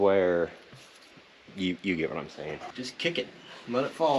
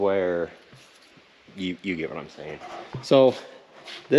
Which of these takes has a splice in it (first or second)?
first